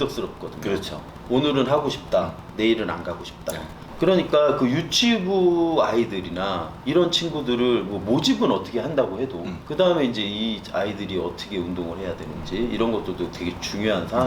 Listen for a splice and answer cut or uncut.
cut